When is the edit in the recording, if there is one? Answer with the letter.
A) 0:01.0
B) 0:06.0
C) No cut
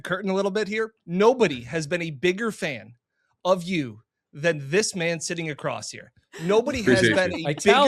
A